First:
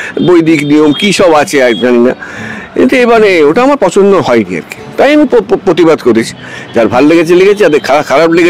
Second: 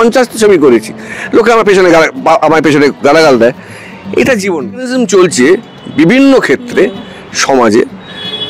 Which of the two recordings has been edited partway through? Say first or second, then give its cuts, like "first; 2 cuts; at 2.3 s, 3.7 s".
second; 1 cut; at 4.9 s